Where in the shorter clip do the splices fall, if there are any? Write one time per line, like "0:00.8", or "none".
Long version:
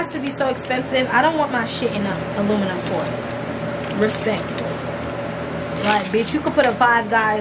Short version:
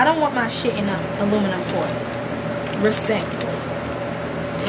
none